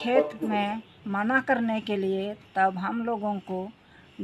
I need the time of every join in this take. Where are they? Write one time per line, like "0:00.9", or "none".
none